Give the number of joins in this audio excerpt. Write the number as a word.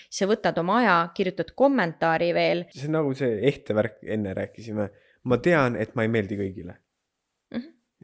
one